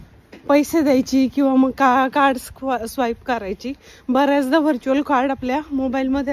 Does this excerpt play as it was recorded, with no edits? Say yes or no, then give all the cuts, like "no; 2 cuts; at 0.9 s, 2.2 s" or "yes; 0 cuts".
yes; 0 cuts